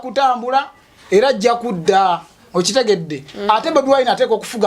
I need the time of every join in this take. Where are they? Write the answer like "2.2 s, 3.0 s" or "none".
none